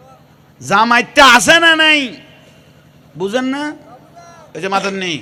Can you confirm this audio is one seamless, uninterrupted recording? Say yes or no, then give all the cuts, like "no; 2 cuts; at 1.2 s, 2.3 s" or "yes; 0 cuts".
yes; 0 cuts